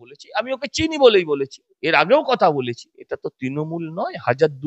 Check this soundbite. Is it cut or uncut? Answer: cut